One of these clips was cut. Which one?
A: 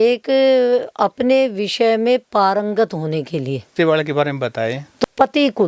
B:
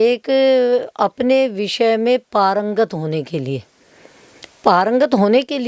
A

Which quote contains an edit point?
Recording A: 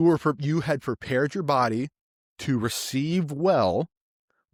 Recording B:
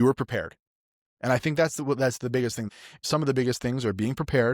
B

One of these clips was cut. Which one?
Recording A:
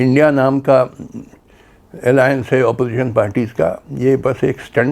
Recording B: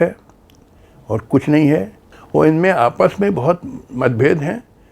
B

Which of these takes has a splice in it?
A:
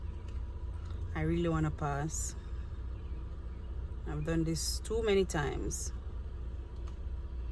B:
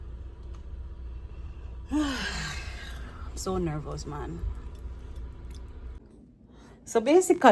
B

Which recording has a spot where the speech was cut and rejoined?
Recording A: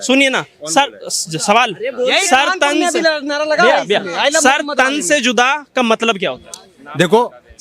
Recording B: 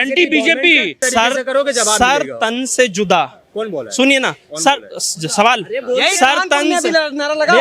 B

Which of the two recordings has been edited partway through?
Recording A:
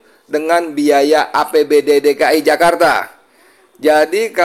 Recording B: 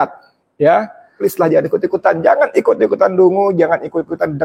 B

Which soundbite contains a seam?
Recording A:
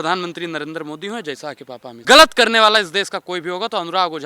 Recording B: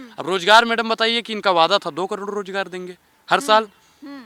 A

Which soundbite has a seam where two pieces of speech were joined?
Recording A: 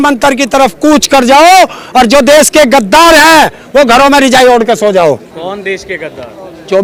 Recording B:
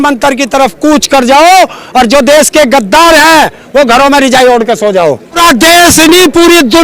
B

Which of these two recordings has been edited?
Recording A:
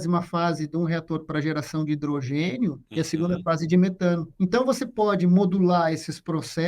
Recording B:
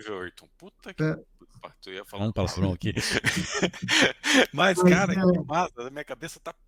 A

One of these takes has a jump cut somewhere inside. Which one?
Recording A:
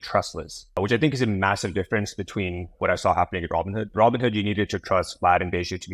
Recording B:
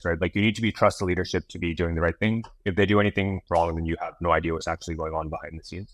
A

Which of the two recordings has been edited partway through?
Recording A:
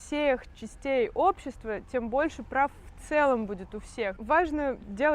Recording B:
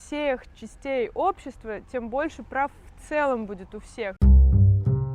B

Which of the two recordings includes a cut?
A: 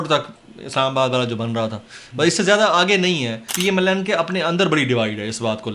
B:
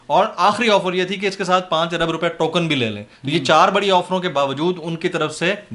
A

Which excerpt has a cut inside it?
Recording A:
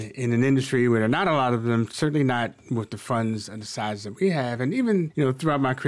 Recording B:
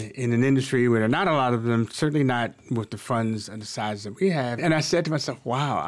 B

